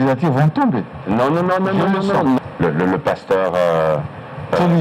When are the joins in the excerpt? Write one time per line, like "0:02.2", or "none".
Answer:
0:02.4